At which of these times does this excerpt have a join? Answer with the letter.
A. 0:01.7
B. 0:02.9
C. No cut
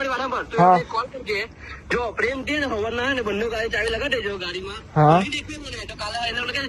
C